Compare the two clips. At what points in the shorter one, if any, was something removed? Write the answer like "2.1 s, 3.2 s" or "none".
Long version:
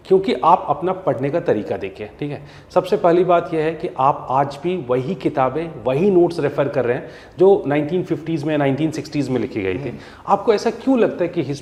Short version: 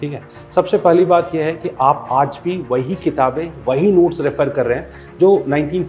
none